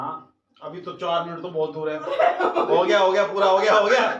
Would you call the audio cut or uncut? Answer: uncut